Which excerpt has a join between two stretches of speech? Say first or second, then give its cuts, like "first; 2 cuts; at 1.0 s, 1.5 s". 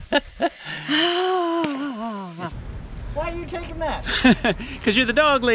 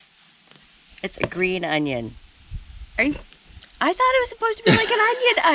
first; 1 cut; at 2.5 s